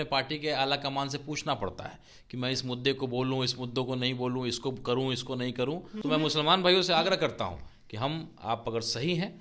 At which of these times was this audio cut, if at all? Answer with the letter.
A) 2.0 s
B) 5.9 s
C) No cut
B